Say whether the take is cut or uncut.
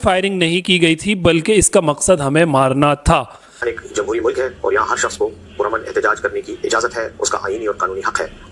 cut